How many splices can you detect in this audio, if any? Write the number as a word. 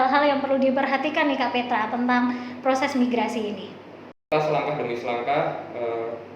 one